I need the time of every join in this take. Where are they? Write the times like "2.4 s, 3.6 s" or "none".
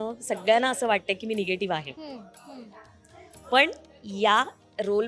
none

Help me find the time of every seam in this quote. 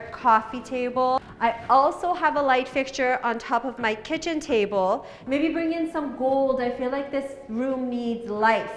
1.2 s, 5.1 s

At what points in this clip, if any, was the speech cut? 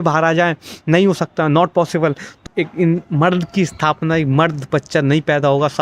2.3 s

